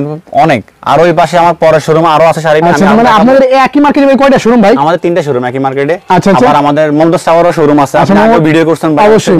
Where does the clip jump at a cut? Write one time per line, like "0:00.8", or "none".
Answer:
none